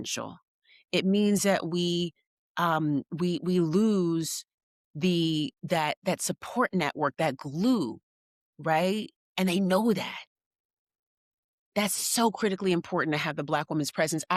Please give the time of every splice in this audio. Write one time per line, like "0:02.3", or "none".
none